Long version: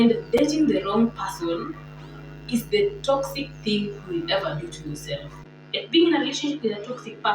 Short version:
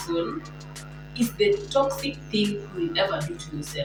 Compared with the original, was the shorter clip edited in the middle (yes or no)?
no